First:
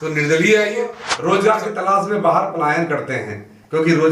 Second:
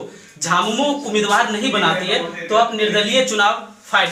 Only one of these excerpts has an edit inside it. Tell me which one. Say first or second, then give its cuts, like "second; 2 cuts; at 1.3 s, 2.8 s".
first; 1 cut; at 1.1 s